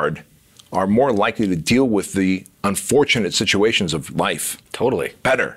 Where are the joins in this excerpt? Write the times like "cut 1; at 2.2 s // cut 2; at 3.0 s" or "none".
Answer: none